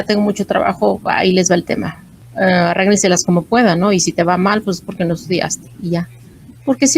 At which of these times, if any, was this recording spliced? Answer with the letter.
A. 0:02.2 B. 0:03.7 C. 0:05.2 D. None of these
A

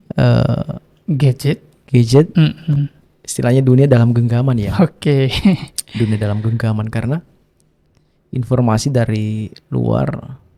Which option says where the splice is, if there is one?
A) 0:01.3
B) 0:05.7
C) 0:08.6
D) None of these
D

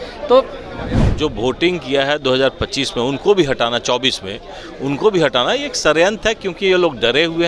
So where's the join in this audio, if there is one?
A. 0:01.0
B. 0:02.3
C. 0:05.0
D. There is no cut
A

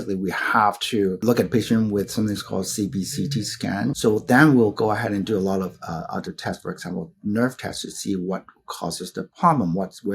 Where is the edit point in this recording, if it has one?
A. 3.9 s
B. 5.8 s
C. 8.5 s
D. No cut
A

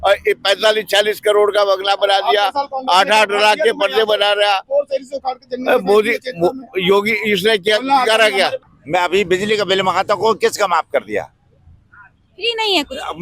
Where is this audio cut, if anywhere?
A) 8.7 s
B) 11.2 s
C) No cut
A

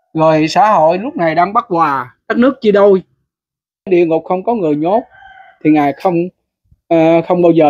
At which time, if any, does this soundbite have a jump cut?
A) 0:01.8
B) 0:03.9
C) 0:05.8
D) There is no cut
B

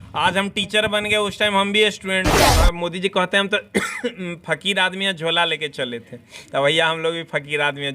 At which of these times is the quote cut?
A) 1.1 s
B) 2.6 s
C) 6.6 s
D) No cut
B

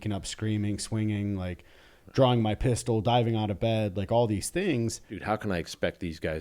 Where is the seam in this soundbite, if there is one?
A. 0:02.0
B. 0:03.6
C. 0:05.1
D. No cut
C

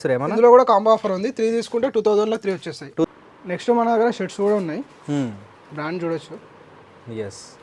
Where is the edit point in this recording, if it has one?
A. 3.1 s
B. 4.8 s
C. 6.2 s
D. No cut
A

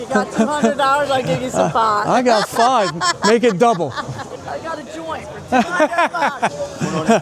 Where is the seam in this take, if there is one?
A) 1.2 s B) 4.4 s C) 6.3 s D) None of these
B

